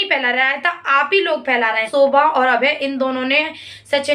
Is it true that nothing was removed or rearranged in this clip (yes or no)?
no